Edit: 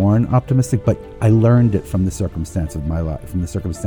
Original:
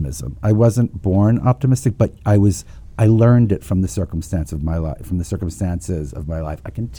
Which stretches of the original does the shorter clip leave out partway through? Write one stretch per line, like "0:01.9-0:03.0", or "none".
0:02.2-0:02.8